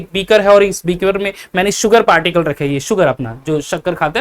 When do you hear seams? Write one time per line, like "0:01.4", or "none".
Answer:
none